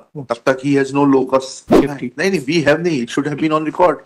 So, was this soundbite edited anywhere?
yes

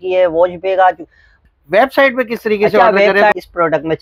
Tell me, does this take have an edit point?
yes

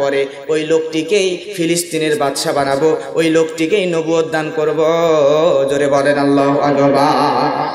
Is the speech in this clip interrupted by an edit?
no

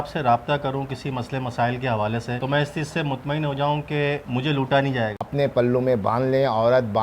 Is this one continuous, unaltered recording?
no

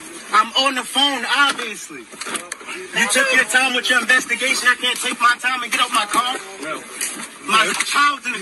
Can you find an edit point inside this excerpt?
no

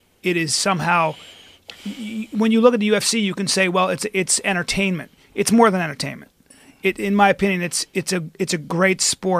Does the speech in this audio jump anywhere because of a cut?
yes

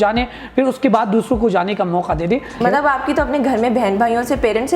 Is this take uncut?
no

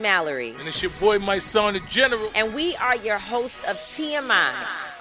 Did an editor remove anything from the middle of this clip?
no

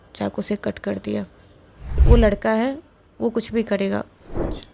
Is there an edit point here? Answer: yes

